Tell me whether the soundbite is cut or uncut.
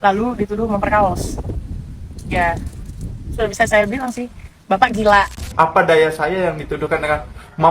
cut